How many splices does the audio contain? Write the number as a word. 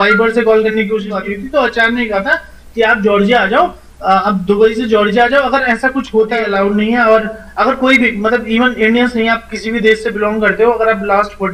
two